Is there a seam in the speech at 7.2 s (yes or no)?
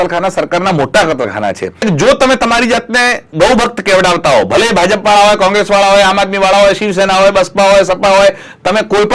no